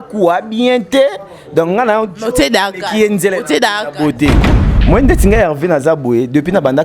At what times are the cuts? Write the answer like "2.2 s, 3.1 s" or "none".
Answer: 4.5 s